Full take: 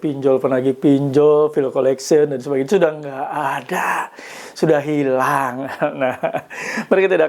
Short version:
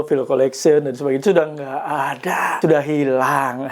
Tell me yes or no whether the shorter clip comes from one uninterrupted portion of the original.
no